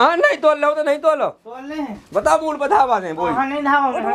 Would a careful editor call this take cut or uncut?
uncut